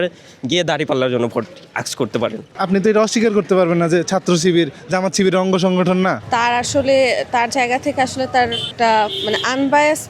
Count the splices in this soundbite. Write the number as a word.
three